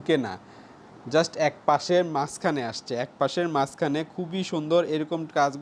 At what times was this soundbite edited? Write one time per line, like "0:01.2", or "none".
none